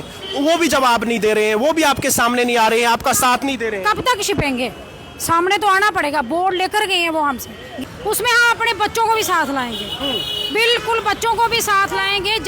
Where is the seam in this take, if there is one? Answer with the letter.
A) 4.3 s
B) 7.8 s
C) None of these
B